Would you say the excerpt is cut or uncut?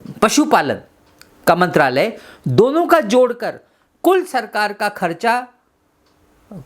uncut